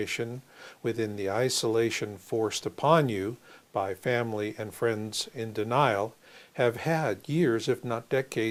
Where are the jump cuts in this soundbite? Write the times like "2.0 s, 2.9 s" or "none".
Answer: none